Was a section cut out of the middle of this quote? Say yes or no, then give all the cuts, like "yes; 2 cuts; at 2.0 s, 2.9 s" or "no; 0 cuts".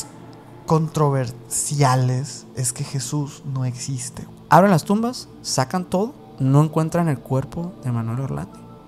yes; 2 cuts; at 4.3 s, 6.2 s